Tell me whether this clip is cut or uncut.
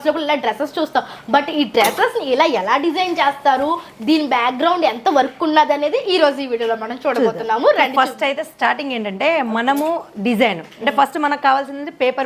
uncut